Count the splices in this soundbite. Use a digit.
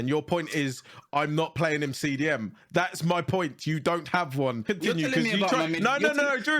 1